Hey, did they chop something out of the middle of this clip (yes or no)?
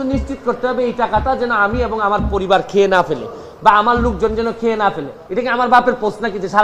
yes